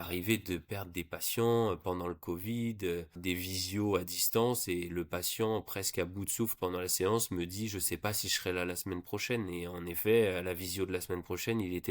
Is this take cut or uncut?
cut